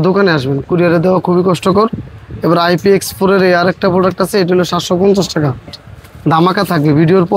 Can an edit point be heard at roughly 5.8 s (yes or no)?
yes